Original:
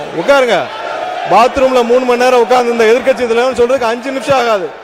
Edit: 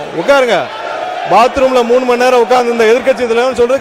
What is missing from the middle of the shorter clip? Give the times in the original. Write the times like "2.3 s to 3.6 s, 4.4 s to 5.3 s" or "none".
none